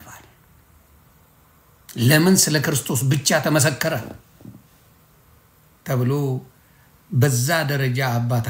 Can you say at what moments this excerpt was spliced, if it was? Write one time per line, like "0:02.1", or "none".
0:01.0